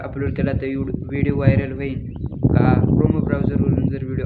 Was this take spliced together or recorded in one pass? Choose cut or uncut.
uncut